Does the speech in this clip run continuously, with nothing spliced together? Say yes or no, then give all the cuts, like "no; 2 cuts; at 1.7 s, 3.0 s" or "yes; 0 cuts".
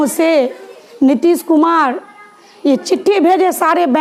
yes; 0 cuts